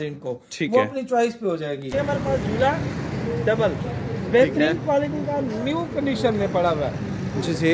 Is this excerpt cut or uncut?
cut